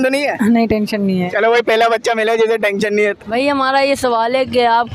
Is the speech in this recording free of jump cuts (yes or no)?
no